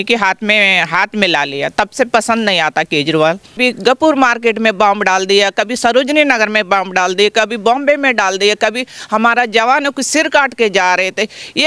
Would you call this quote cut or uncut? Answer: cut